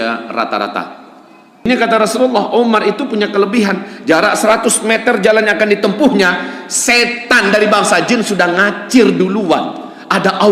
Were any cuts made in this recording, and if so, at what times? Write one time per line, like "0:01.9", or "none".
0:01.7